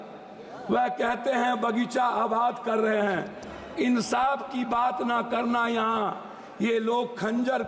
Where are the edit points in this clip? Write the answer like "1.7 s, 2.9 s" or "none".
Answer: none